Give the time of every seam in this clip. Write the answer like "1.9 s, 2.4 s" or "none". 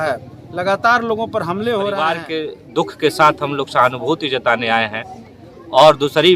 2.3 s